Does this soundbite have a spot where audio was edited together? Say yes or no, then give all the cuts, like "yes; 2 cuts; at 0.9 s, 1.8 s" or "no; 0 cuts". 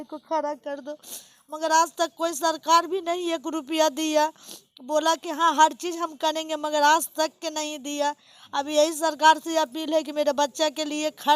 no; 0 cuts